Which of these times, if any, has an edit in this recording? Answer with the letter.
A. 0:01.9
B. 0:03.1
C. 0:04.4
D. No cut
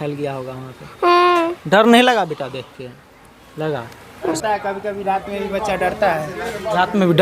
C